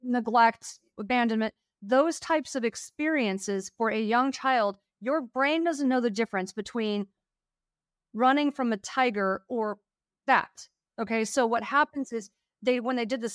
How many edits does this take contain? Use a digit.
1